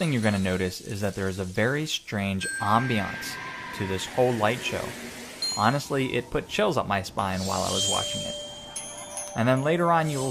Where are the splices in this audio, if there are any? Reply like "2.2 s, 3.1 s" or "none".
5.8 s